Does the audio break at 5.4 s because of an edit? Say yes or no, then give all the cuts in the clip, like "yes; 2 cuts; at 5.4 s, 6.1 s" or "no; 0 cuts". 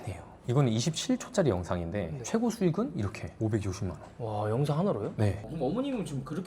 yes; 1 cut; at 5.4 s